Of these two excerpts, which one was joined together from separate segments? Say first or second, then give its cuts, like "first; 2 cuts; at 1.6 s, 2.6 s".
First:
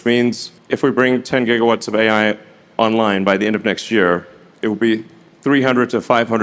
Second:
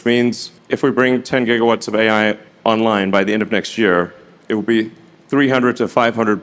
second; 1 cut; at 2.5 s